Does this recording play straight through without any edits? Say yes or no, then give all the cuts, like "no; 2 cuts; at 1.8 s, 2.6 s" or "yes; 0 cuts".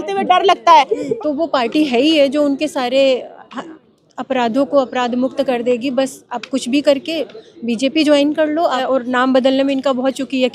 no; 2 cuts; at 1.0 s, 8.8 s